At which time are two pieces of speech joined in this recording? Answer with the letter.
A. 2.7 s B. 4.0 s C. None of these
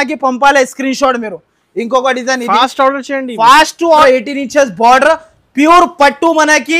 B